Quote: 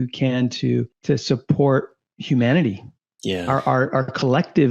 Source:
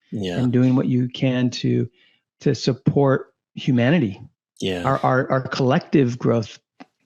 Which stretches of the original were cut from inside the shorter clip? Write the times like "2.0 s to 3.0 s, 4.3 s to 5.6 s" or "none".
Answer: 2.0 s to 2.3 s